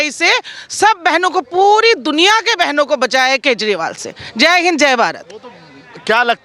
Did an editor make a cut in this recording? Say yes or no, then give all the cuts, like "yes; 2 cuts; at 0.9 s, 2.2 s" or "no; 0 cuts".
no; 0 cuts